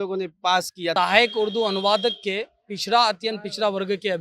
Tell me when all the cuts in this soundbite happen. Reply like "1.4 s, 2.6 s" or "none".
0.9 s